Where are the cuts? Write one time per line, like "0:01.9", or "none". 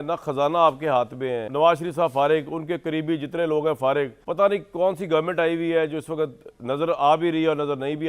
0:04.2